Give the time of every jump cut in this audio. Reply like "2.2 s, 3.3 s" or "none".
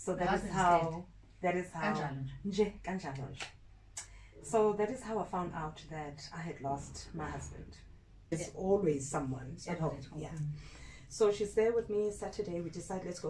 8.3 s